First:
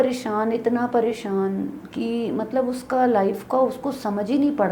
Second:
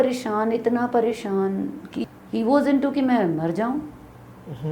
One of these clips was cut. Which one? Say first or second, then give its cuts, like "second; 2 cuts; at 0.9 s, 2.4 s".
second; 1 cut; at 1.9 s